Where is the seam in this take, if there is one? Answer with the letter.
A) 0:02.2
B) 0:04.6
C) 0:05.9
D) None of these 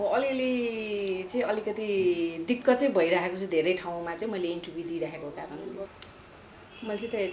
C